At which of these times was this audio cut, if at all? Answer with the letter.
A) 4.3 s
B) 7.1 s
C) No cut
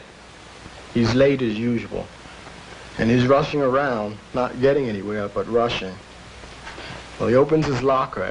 B